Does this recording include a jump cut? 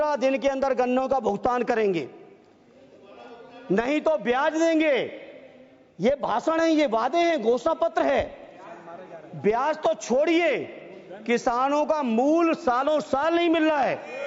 no; 0 cuts

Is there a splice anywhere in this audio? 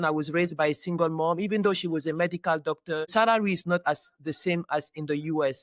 yes; 1 cut; at 3.1 s

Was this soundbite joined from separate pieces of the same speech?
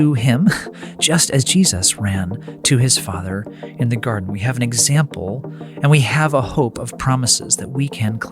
no; 0 cuts

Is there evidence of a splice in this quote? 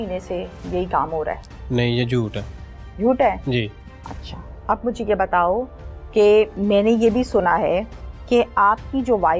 no; 0 cuts

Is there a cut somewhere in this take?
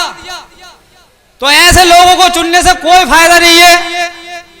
yes; 1 cut; at 1.2 s

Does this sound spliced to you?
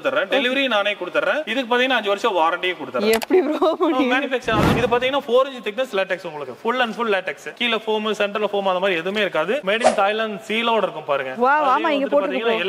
yes; 2 cuts; at 4.7 s, 9.6 s

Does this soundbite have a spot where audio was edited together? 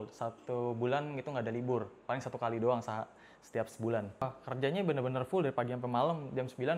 yes; 1 cut; at 4.2 s

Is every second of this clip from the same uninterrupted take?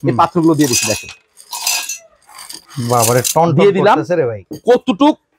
no; 2 cuts; at 2.5 s, 4.4 s

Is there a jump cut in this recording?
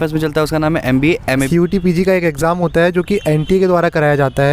yes; 1 cut; at 1.5 s

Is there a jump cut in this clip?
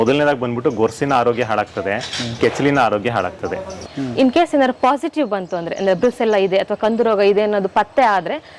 yes; 1 cut; at 3.9 s

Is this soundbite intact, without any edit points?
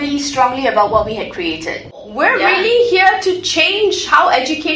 no; 1 cut; at 2.0 s

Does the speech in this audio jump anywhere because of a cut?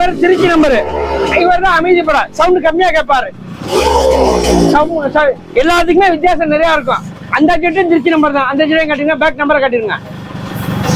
no; 0 cuts

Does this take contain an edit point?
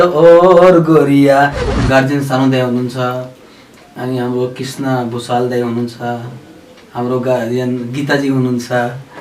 yes; 1 cut; at 1.7 s

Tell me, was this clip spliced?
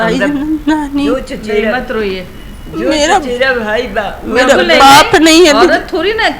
no; 0 cuts

